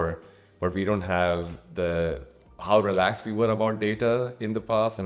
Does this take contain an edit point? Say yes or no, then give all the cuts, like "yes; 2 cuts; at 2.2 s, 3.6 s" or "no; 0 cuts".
no; 0 cuts